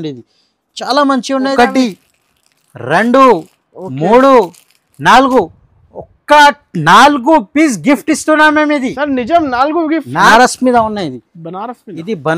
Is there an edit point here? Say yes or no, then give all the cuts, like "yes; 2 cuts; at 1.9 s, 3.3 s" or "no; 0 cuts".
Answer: yes; 2 cuts; at 1.5 s, 10.3 s